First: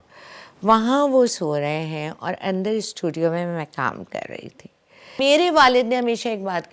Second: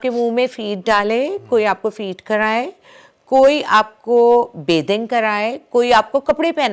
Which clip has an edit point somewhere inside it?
first; 1 cut; at 5.2 s

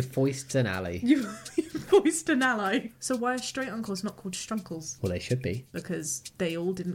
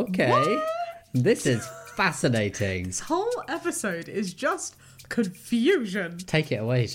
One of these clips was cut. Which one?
first; 3 cuts; at 2.9 s, 4.9 s, 5.8 s

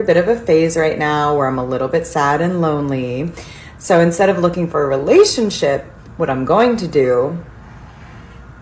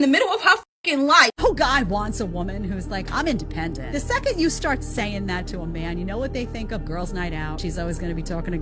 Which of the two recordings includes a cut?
second; 1 cut; at 1.3 s

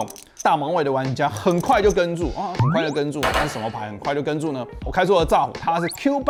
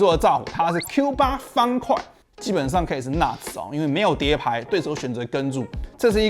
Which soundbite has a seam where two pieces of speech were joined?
second; 2 cuts; at 2.2 s, 4.7 s

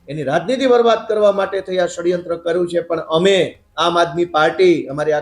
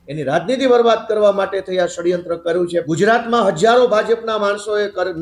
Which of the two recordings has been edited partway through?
second; 1 cut; at 2.8 s

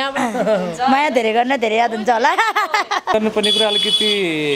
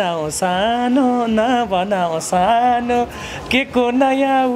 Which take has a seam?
first; 1 cut; at 3.1 s

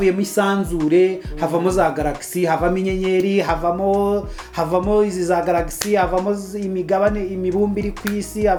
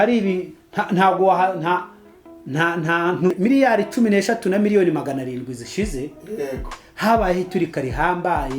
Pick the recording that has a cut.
second; 1 cut; at 3.3 s

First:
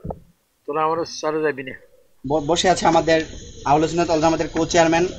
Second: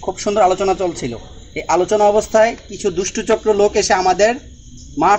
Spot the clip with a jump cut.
first; 1 cut; at 2.2 s

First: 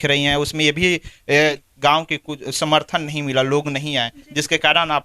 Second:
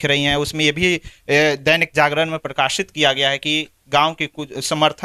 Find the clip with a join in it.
first; 1 cut; at 1.6 s

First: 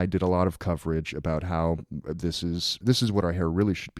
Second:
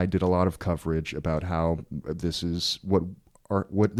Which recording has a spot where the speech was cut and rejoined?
first; 1 cut; at 2.8 s

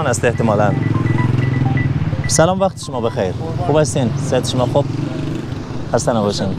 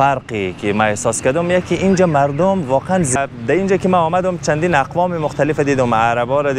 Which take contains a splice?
second; 1 cut; at 3.1 s

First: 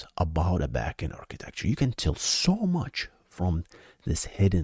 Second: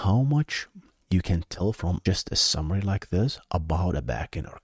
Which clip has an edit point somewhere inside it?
second; 1 cut; at 2.0 s

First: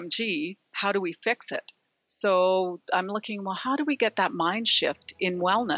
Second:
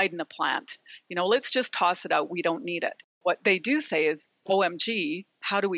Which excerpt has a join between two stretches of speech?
second; 1 cut; at 3.2 s

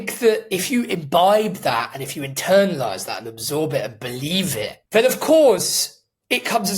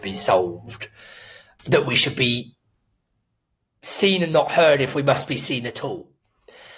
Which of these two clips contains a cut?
first; 1 cut; at 4.8 s

